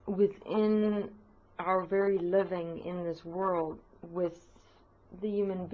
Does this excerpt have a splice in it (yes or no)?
yes